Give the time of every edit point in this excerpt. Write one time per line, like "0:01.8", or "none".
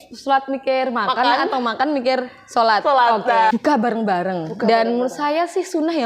0:03.5